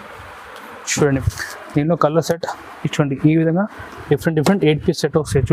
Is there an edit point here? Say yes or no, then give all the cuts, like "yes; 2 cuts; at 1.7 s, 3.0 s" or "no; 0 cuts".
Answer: yes; 1 cut; at 1.2 s